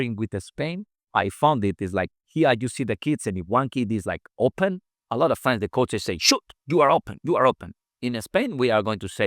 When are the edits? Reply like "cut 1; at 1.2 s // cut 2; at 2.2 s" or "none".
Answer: cut 1; at 7.1 s